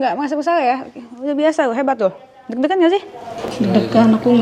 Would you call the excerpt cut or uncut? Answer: uncut